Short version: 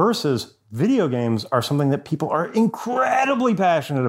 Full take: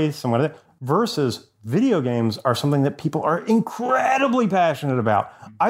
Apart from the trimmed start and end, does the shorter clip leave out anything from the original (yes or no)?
no